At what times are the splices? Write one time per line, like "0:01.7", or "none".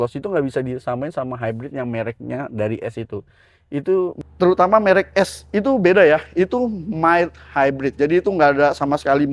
0:04.2